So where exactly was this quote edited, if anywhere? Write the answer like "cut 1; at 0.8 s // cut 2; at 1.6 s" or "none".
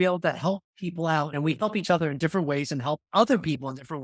cut 1; at 1.3 s